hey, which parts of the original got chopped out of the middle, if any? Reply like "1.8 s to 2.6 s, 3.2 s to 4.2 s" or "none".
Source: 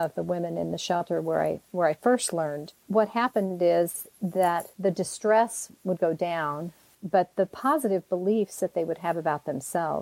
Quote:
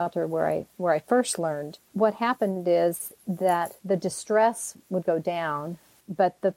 none